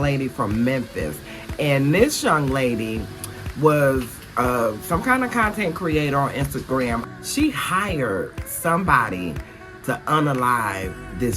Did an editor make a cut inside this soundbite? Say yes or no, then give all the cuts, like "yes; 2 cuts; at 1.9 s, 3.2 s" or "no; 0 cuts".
yes; 1 cut; at 7.1 s